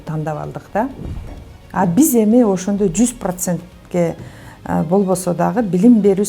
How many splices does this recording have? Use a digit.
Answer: 1